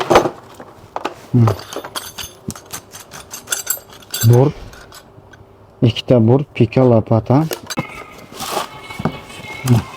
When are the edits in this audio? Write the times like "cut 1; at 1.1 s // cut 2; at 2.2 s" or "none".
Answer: cut 1; at 7.7 s